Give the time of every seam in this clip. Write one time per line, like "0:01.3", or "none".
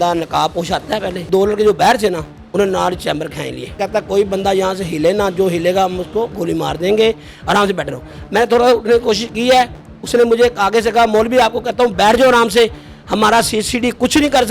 0:01.3
0:03.8